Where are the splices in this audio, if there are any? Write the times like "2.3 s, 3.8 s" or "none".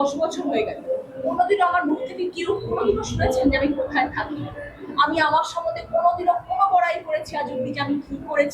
1.4 s